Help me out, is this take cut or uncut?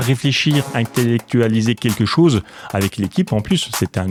uncut